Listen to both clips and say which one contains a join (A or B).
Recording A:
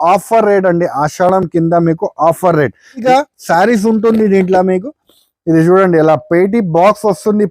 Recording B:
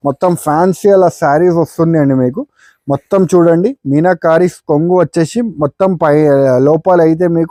A